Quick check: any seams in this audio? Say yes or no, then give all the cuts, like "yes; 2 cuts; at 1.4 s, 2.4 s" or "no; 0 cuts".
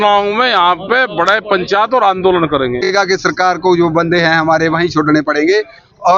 yes; 1 cut; at 2.9 s